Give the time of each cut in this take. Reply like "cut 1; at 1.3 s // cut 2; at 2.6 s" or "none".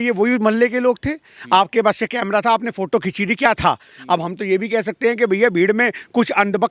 none